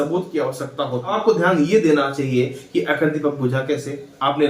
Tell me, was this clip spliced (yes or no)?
yes